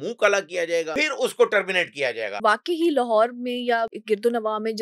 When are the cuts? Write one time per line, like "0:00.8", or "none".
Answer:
0:00.9
0:02.4
0:04.0